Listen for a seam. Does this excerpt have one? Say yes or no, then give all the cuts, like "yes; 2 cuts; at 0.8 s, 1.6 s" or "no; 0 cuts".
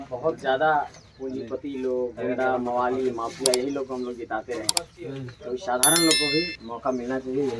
no; 0 cuts